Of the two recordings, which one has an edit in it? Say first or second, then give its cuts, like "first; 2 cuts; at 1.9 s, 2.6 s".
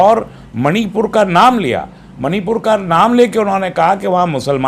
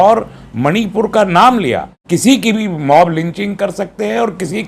second; 1 cut; at 1.9 s